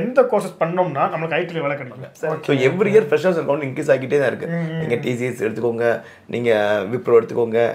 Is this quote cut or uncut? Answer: cut